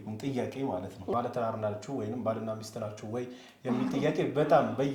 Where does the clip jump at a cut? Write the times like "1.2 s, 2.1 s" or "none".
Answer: 1.1 s